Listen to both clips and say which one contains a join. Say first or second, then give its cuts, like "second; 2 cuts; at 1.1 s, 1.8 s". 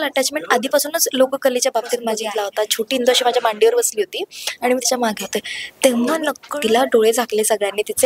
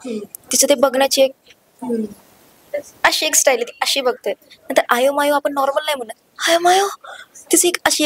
first; 2 cuts; at 2.2 s, 6.4 s